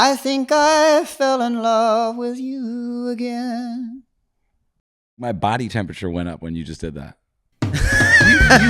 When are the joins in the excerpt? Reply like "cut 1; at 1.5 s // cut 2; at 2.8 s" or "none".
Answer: cut 1; at 5.2 s